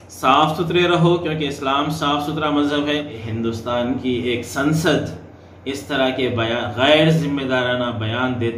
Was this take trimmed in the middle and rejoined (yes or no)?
yes